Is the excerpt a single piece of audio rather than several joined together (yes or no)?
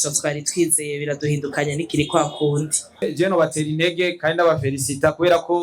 no